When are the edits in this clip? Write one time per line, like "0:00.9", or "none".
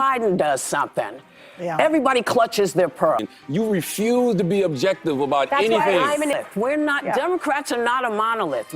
0:03.3
0:06.5